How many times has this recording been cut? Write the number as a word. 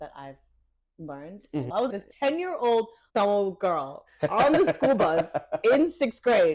two